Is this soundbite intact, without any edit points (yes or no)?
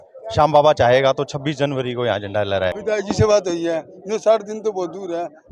no